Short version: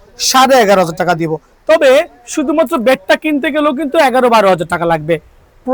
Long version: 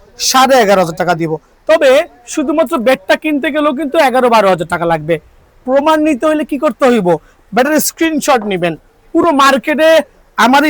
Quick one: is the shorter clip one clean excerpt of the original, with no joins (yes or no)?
yes